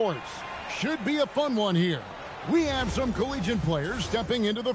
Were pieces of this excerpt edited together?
no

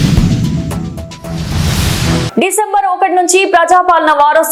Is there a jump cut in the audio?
no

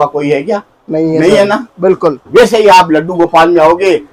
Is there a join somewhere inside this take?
no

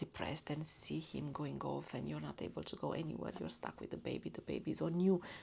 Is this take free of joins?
yes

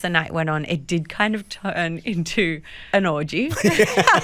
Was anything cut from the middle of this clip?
yes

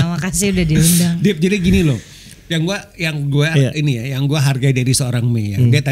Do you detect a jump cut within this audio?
no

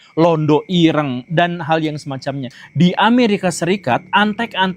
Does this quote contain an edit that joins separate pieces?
yes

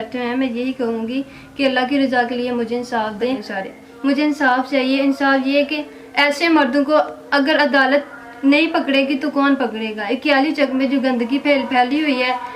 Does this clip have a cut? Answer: yes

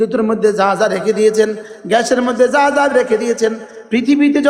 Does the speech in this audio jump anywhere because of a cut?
no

